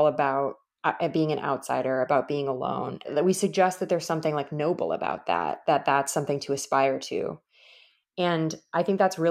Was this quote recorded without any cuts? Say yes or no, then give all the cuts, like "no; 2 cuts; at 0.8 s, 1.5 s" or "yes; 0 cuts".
no; 1 cut; at 3.1 s